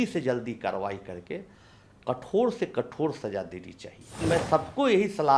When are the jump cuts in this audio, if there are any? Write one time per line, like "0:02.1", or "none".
0:04.2